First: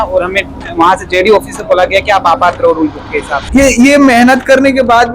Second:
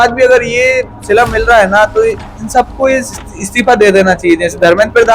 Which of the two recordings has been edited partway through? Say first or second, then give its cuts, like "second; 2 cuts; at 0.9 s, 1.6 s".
first; 1 cut; at 3.4 s